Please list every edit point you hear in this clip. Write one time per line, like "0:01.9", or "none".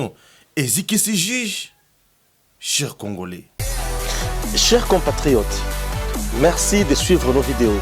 0:03.5